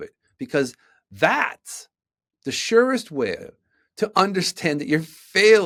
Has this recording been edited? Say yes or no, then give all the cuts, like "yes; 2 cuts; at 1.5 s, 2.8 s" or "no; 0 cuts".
no; 0 cuts